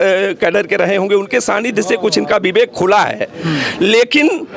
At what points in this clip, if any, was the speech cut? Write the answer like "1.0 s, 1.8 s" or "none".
none